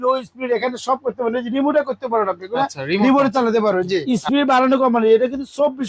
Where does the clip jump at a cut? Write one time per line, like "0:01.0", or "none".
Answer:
0:04.0

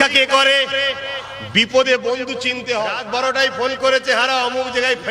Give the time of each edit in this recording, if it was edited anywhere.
0:03.0

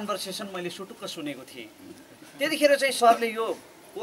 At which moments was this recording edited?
none

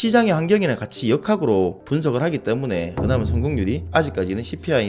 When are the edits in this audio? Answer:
0:03.8

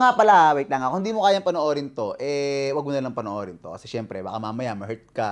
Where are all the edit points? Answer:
none

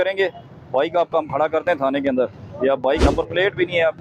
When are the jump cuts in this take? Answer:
0:03.0

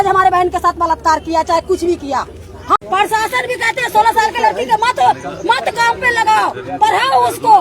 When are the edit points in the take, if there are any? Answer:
0:02.8

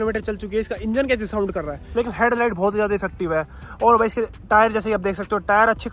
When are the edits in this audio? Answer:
0:01.8

